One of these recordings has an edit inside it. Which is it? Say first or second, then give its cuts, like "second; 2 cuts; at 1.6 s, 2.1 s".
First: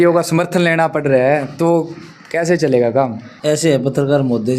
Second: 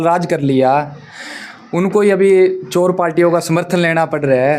first; 1 cut; at 3.3 s